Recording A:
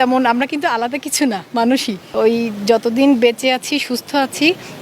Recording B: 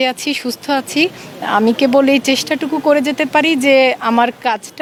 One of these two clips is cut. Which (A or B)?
A